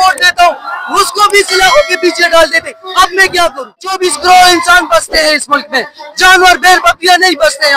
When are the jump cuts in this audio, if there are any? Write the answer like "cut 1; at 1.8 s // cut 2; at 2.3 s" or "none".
cut 1; at 4.0 s